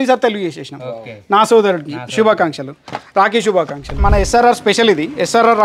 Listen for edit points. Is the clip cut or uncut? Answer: cut